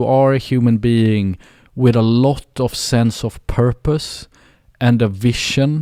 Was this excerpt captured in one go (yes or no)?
yes